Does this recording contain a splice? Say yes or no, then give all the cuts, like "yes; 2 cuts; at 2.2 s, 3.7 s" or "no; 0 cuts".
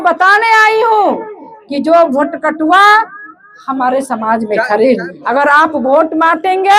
yes; 1 cut; at 5.1 s